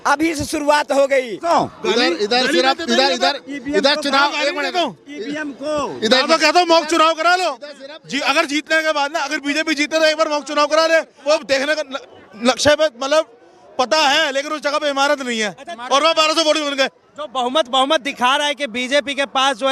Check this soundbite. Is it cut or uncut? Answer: cut